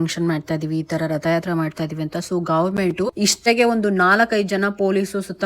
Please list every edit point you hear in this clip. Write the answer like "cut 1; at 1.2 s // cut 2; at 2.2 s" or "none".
cut 1; at 3.4 s